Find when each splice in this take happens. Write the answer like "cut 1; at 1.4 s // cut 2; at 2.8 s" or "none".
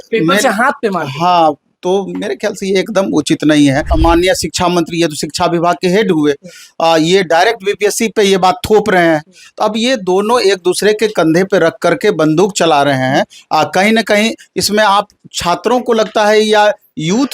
cut 1; at 3.9 s